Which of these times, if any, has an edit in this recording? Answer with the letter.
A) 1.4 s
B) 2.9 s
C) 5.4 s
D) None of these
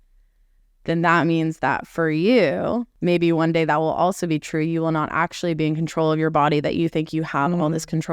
B